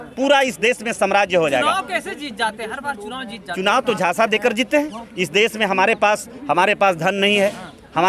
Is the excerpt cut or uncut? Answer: uncut